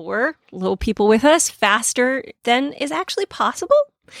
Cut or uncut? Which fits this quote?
uncut